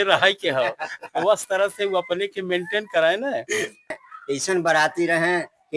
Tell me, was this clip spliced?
yes; 1 cut; at 4.0 s

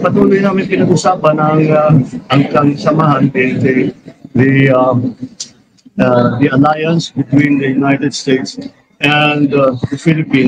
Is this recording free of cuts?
yes; 0 cuts

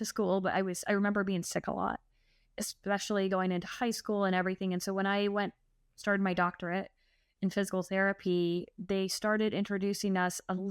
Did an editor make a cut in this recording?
no; 0 cuts

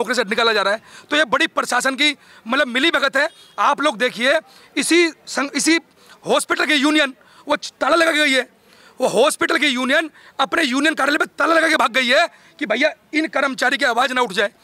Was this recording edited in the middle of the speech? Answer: no; 0 cuts

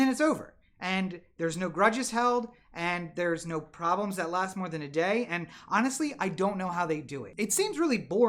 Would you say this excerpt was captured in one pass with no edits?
no; 1 cut; at 7.2 s

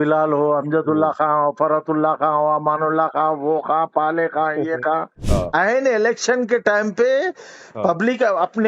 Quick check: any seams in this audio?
yes; 1 cut; at 5.2 s

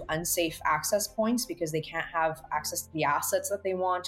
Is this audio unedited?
yes; 0 cuts

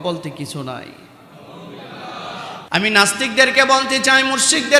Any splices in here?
yes; 1 cut; at 2.5 s

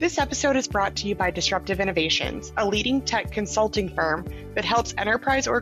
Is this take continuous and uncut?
yes; 0 cuts

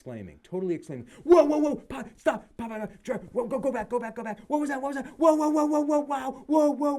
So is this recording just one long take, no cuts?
yes; 0 cuts

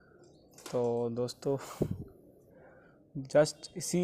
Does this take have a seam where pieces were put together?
no; 0 cuts

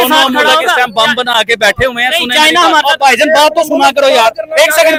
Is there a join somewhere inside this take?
no; 0 cuts

